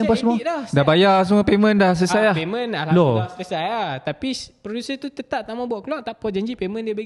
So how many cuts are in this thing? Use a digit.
0